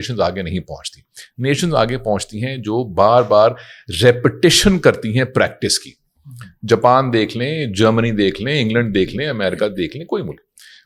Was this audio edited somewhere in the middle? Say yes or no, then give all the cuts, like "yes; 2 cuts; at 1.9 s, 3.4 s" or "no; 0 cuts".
no; 0 cuts